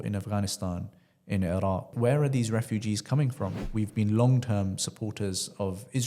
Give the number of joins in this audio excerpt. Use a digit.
2